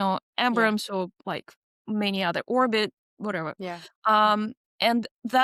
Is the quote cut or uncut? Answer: uncut